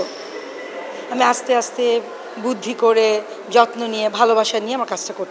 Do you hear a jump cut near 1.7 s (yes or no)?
no